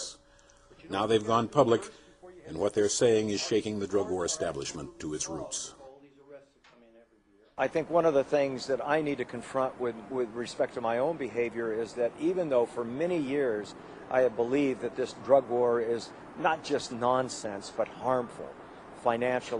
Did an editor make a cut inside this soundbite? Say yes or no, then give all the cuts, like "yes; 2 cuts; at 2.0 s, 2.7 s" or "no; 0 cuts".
no; 0 cuts